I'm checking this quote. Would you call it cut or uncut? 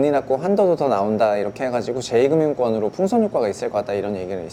uncut